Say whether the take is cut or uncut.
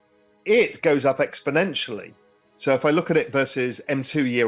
uncut